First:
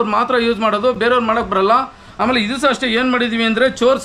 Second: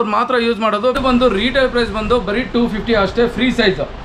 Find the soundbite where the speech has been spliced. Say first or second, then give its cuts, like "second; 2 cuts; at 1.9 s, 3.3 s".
second; 1 cut; at 1.0 s